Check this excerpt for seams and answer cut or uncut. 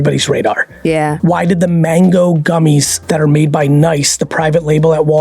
cut